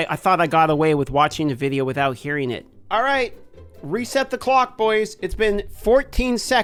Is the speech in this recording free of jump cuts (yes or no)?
yes